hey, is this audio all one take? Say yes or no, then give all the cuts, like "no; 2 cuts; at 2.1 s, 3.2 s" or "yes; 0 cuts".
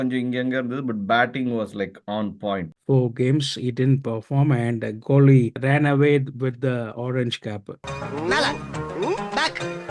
no; 2 cuts; at 2.7 s, 5.6 s